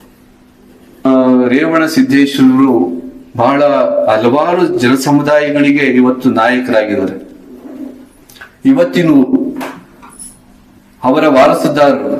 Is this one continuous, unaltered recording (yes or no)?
no